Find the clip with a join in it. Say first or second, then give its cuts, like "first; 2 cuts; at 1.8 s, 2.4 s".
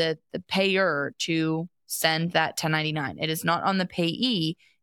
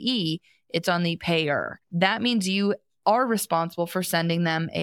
second; 1 cut; at 1.8 s